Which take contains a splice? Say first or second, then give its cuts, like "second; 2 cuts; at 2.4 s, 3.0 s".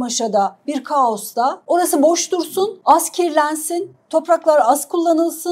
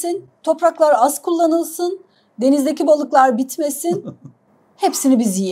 first; 2 cuts; at 1.6 s, 2.8 s